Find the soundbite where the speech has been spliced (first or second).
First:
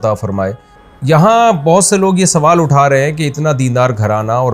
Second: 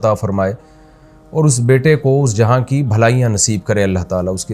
first